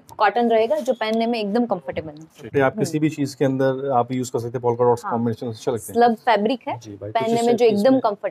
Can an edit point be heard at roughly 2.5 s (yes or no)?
yes